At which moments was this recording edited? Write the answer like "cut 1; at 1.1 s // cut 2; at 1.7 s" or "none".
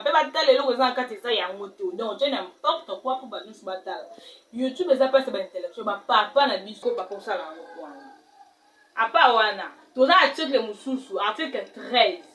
cut 1; at 6.8 s